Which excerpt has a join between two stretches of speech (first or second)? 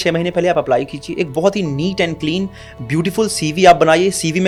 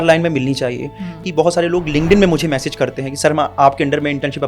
second